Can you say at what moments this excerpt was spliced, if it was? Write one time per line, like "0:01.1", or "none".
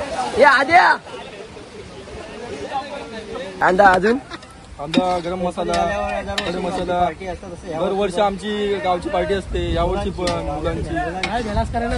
0:03.5